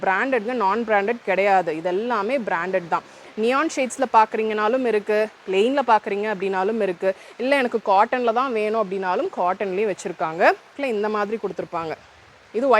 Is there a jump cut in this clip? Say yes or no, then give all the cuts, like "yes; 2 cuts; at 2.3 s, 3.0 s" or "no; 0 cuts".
yes; 1 cut; at 10.8 s